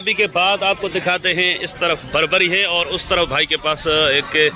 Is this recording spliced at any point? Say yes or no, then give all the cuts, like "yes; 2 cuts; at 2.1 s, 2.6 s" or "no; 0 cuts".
no; 0 cuts